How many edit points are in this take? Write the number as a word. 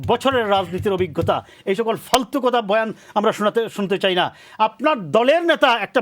zero